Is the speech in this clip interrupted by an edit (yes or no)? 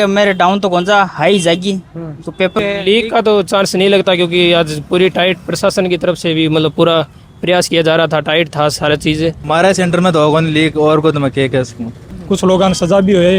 yes